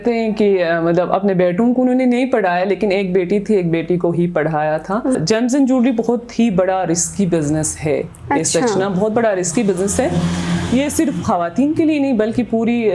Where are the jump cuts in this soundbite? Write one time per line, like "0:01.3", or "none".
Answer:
0:05.1